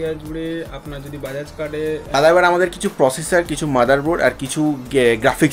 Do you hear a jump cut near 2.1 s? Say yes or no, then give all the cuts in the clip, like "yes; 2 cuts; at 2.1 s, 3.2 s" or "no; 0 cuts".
yes; 1 cut; at 2.1 s